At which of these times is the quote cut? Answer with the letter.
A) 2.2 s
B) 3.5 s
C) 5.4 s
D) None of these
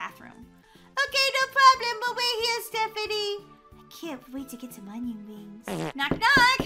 D